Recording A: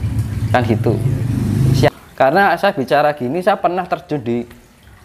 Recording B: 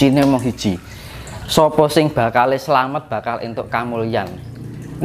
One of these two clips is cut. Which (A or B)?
A